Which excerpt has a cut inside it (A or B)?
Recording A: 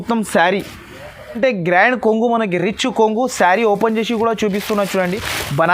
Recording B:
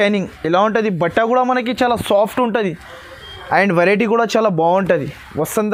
A